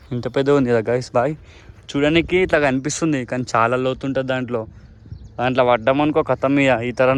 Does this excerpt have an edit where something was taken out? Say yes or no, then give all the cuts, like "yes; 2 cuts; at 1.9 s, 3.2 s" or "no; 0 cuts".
no; 0 cuts